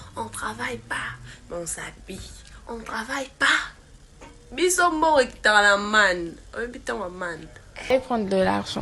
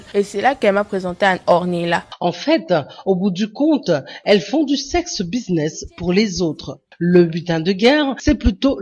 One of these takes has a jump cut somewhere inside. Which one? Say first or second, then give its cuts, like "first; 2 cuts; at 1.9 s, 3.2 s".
first; 1 cut; at 7.9 s